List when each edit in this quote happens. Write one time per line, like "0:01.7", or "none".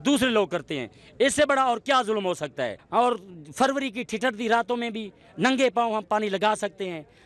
0:02.8